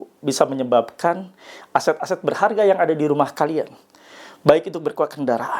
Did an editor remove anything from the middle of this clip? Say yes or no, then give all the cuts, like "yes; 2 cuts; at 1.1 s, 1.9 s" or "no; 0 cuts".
no; 0 cuts